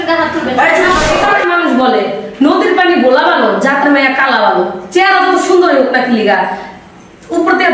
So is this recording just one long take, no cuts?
no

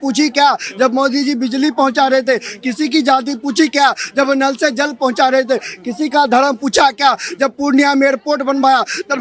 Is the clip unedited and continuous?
yes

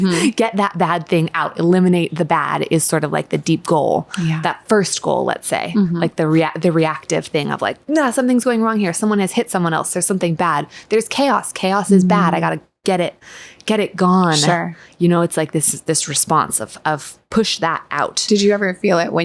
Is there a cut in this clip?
no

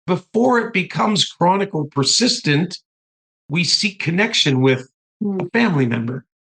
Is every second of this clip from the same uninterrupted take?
yes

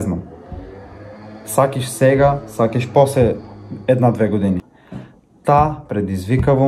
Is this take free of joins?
no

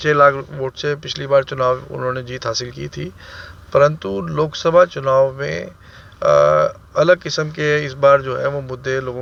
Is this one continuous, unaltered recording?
yes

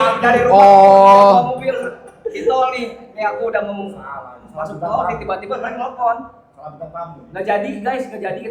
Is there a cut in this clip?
no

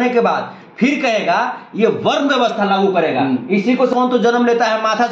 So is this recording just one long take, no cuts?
no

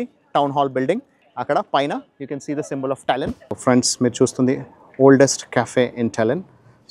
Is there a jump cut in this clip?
yes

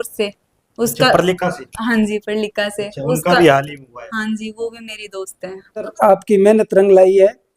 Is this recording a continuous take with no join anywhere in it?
no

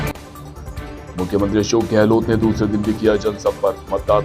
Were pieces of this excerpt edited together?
no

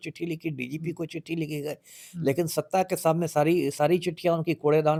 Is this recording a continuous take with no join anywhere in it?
yes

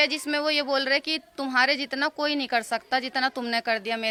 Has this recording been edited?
no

